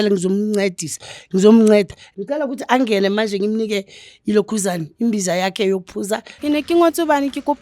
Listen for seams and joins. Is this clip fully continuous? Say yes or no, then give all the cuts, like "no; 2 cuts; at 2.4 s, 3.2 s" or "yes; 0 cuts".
no; 2 cuts; at 2.0 s, 6.3 s